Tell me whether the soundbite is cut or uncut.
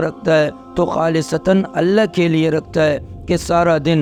uncut